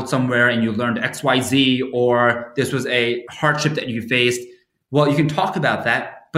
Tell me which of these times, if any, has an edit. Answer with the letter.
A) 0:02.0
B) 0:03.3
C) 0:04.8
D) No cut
B